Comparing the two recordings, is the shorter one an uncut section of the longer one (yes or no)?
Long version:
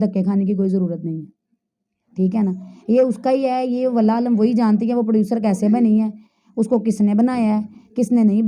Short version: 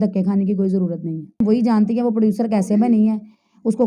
no